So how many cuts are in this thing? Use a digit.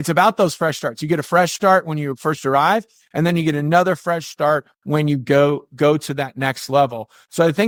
0